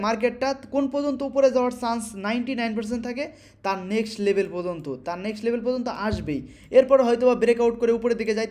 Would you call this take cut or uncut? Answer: uncut